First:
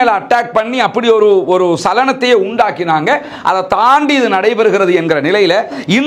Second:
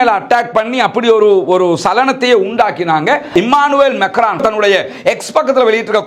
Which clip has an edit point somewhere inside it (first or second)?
second